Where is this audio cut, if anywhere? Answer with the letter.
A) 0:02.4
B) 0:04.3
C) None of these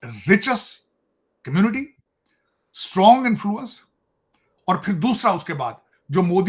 C